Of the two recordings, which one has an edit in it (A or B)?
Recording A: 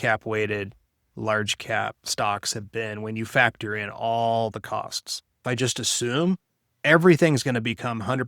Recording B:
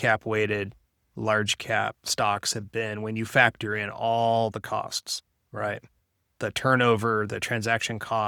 A